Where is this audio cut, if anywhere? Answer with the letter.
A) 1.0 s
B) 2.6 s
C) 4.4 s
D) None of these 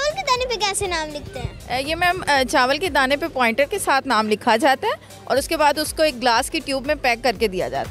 D